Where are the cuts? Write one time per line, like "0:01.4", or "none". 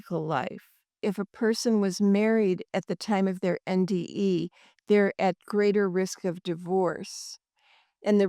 0:01.0